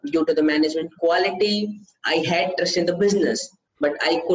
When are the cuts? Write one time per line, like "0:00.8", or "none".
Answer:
none